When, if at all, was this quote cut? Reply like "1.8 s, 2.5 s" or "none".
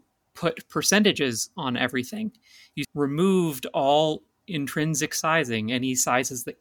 2.7 s